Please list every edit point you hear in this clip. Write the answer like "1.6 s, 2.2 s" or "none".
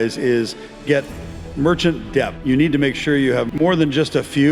2.4 s, 3.5 s